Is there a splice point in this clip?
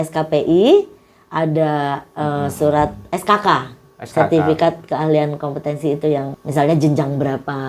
yes; 1 cut; at 6.4 s

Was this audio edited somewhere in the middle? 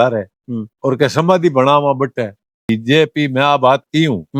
yes; 1 cut; at 2.6 s

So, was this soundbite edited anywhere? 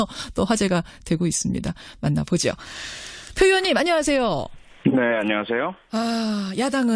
yes; 1 cut; at 2.8 s

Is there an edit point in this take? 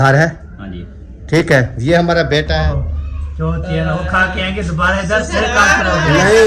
yes; 1 cut; at 2.6 s

